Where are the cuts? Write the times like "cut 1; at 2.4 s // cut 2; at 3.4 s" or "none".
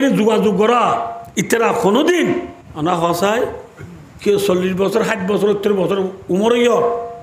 cut 1; at 1.2 s // cut 2; at 2.6 s